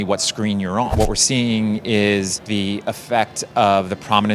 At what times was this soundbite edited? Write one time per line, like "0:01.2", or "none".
0:00.9
0:02.4